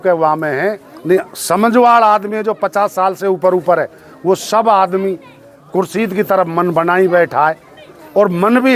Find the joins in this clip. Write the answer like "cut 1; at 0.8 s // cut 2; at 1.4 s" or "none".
none